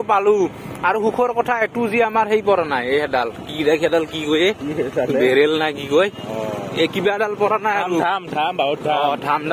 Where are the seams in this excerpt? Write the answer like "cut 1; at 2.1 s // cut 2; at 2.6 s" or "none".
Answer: none